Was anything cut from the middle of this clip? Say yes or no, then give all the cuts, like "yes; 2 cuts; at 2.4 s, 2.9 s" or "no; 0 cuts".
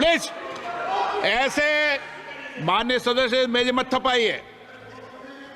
no; 0 cuts